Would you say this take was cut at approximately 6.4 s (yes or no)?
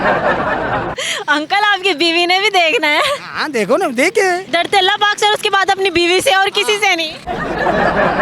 no